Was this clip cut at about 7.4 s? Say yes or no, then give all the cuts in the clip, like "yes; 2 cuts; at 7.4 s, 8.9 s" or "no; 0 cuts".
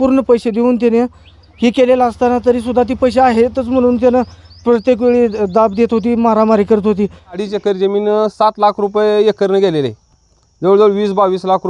yes; 1 cut; at 7.4 s